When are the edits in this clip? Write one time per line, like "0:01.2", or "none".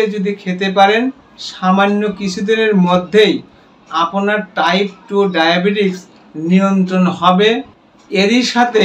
none